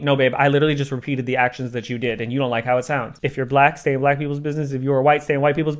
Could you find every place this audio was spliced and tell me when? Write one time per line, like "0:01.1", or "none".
0:03.2